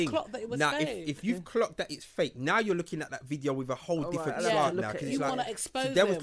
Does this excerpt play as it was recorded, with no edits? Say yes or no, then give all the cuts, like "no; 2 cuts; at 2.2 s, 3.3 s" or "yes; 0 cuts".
yes; 0 cuts